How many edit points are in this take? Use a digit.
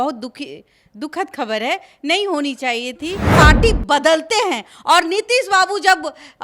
1